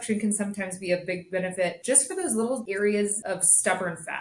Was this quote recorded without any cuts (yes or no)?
no